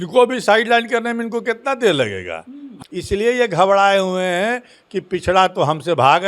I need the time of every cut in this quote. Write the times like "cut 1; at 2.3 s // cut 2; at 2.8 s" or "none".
cut 1; at 2.7 s